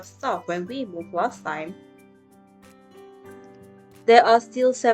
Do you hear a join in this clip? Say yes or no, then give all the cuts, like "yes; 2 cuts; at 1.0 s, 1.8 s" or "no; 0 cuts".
yes; 2 cuts; at 2.2 s, 3.9 s